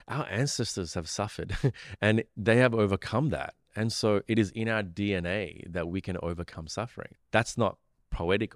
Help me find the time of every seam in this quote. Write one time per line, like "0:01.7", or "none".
0:07.0